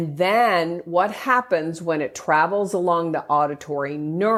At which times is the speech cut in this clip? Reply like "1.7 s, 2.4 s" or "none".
none